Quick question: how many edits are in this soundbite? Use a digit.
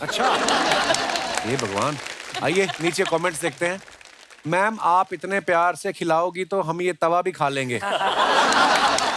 0